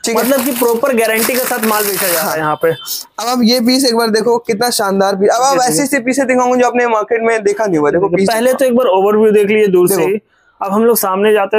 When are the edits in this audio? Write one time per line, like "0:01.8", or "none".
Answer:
none